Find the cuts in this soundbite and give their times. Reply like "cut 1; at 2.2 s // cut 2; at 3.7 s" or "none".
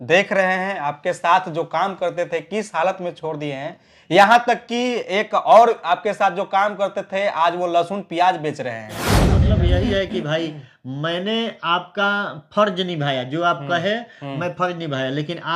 cut 1; at 9.3 s